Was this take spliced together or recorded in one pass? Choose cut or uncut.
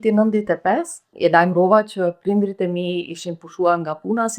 cut